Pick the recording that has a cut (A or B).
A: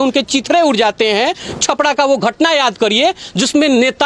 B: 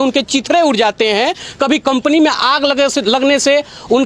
A